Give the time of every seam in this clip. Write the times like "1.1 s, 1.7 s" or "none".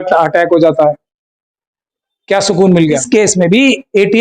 3.0 s